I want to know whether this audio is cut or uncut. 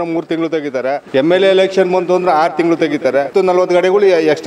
cut